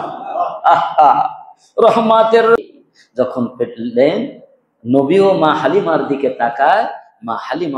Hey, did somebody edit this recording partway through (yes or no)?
yes